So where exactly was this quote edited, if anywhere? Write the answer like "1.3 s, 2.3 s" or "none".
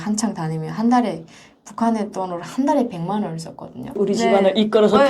3.9 s